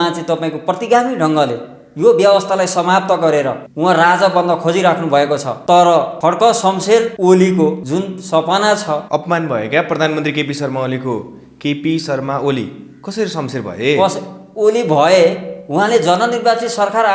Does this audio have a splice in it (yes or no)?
yes